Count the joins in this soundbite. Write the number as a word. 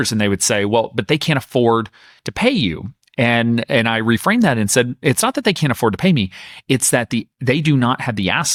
zero